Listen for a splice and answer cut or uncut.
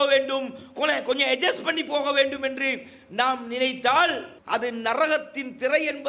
cut